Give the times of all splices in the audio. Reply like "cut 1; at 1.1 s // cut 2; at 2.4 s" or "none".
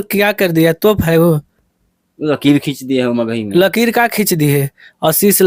none